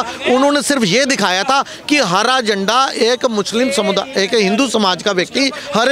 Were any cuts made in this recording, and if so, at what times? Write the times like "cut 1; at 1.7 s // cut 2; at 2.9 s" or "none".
none